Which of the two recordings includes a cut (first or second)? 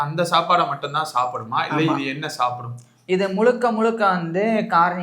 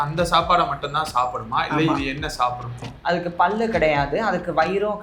second